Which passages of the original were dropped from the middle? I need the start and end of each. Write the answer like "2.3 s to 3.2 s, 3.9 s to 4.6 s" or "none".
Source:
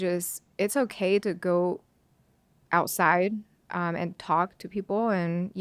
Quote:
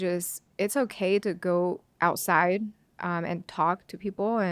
1.9 s to 2.6 s